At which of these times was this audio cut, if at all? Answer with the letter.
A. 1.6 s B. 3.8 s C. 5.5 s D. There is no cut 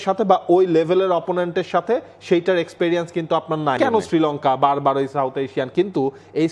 B